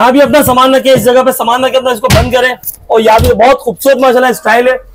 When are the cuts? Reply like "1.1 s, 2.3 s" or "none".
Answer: none